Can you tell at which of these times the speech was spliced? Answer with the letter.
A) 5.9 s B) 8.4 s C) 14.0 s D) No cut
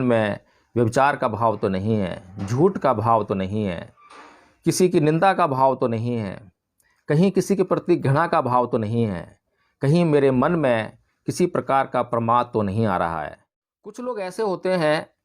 C